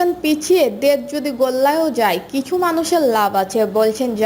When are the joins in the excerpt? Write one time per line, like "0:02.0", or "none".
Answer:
none